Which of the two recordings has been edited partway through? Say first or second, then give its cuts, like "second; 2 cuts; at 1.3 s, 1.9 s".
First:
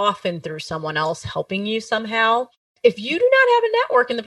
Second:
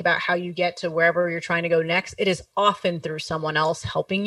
first; 1 cut; at 2.7 s